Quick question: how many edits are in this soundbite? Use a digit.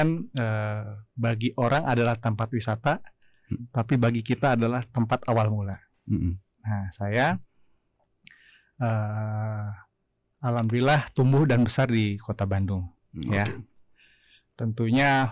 0